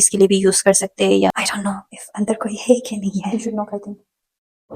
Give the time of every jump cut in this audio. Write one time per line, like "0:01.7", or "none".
0:01.3